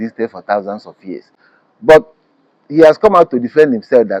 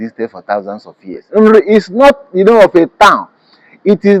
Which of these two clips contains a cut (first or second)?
second